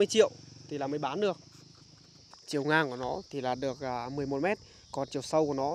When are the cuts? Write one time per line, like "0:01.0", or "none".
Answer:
0:02.3

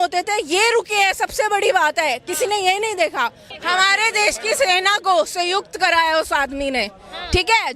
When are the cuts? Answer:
none

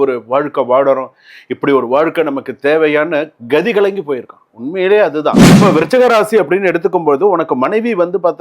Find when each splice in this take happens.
0:05.5

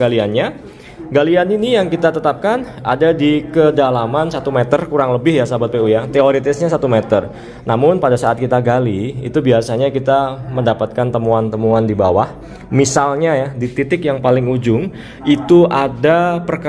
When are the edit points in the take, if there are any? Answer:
none

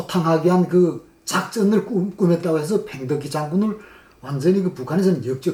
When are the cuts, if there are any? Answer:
none

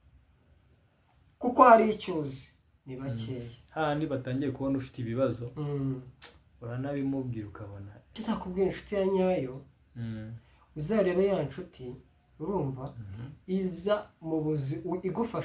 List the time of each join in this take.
0:08.2

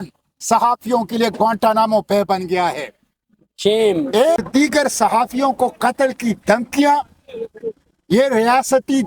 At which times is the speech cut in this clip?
0:04.4

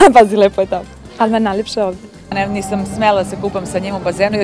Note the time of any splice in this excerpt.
0:02.3

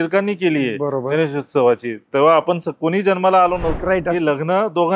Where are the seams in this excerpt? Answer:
0:03.8

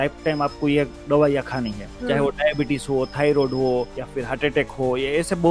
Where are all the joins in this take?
0:01.9
0:04.0

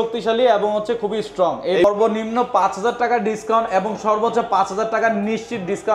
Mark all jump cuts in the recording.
0:01.8

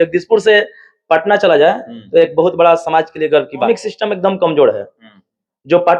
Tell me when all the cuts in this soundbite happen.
0:03.7

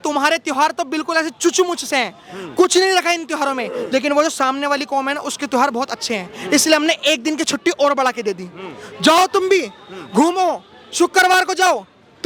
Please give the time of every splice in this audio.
none

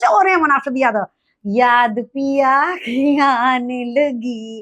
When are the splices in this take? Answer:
0:01.3

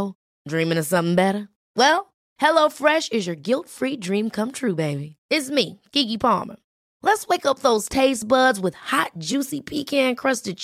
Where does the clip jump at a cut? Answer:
none

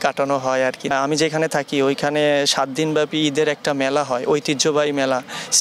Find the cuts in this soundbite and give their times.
0:00.9

